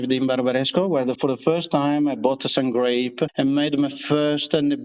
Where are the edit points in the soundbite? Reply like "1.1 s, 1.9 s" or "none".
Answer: 1.2 s